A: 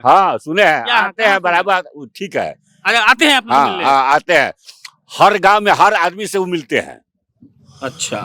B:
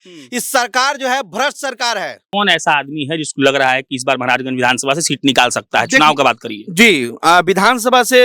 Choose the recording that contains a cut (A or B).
B